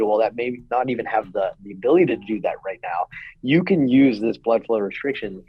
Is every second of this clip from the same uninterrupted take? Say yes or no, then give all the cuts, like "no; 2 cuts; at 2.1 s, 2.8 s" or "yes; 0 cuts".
yes; 0 cuts